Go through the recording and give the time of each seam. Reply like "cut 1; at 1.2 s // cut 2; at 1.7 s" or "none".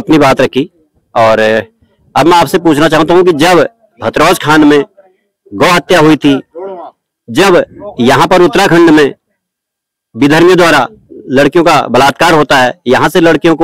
none